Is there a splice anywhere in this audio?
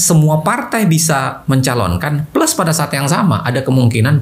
no; 0 cuts

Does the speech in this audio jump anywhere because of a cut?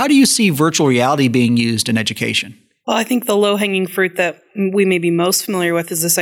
no; 0 cuts

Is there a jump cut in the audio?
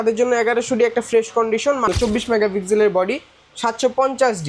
yes; 1 cut; at 1.9 s

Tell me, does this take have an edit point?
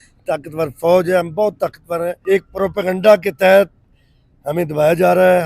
yes; 1 cut; at 2.2 s

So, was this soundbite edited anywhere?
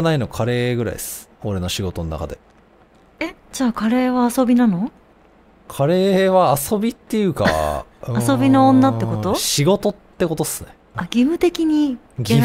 no; 0 cuts

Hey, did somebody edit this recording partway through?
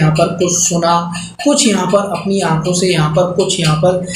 no; 0 cuts

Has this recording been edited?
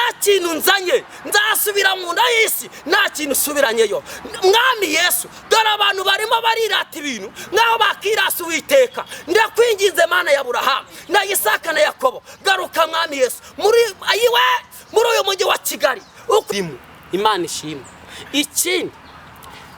yes; 1 cut; at 16.5 s

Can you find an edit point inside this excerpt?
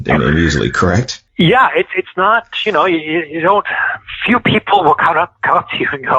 yes; 1 cut; at 1.2 s

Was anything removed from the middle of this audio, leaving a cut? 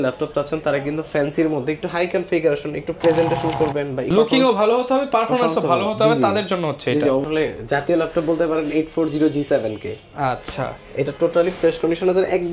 yes; 2 cuts; at 4.1 s, 7.2 s

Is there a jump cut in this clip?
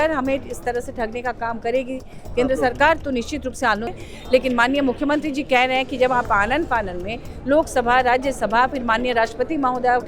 yes; 1 cut; at 3.9 s

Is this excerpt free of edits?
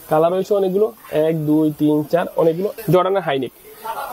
no; 1 cut; at 2.8 s

